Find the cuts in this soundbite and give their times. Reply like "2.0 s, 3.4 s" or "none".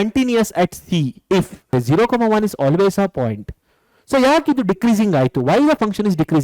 1.7 s